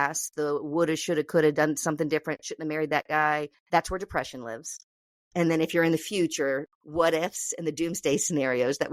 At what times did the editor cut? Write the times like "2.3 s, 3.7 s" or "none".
3.6 s, 6.7 s